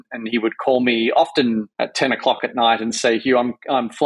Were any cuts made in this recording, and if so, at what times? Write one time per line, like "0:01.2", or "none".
0:01.7